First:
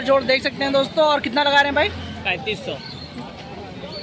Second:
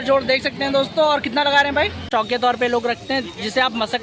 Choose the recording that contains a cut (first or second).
second